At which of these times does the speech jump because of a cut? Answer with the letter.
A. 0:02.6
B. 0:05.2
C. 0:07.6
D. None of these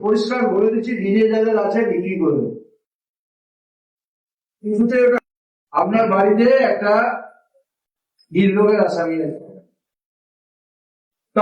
B